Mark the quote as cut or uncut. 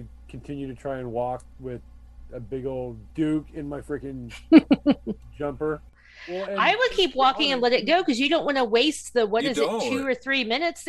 cut